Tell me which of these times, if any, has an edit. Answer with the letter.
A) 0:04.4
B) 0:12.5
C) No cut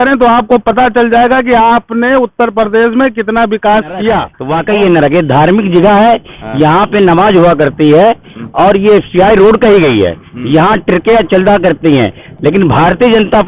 A